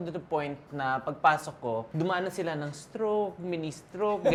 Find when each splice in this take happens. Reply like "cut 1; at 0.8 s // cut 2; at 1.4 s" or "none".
none